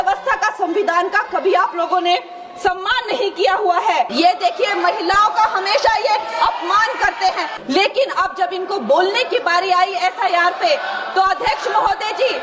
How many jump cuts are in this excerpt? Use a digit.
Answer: 2